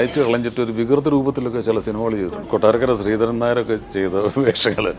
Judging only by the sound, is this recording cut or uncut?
cut